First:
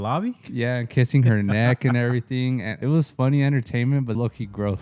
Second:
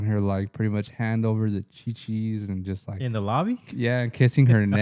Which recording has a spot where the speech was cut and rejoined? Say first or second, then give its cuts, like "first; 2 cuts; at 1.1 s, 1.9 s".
first; 2 cuts; at 2.7 s, 4.1 s